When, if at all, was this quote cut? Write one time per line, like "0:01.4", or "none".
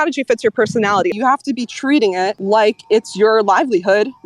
0:01.1
0:02.4